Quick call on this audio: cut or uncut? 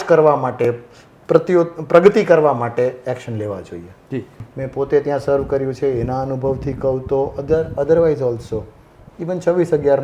cut